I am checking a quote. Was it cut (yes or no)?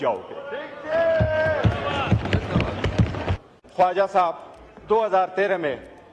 yes